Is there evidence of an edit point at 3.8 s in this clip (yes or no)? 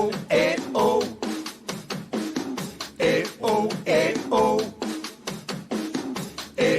no